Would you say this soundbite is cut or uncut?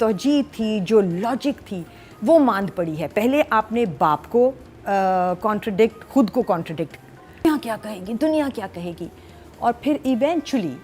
cut